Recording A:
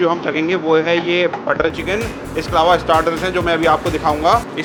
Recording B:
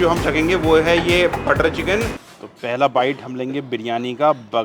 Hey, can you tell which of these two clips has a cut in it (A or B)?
B